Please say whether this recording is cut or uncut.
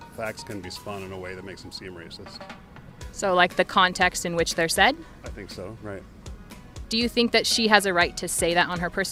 uncut